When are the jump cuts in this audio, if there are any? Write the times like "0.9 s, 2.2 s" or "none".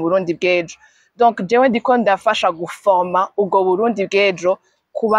none